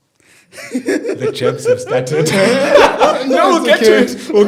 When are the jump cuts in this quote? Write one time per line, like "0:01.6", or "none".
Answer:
none